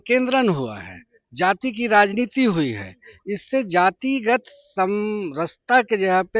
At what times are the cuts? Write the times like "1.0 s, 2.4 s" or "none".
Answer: none